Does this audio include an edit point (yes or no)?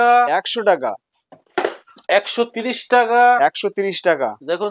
no